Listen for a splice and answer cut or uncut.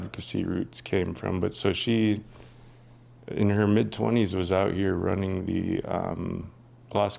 uncut